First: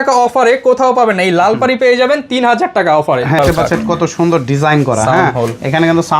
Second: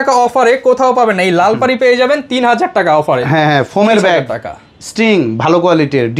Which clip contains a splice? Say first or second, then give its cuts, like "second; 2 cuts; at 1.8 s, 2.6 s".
first; 1 cut; at 3.4 s